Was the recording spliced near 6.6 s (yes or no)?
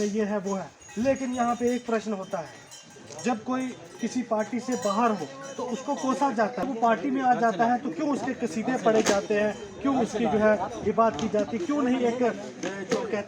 yes